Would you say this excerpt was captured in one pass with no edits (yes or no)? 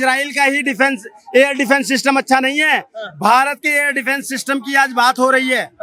yes